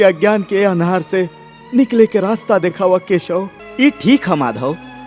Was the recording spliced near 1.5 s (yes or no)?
no